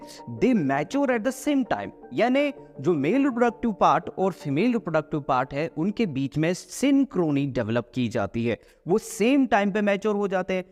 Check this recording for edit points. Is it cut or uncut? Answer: uncut